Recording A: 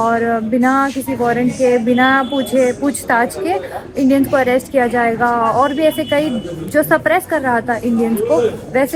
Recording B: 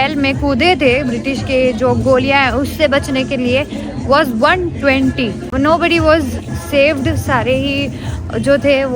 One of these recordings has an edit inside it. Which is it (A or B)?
B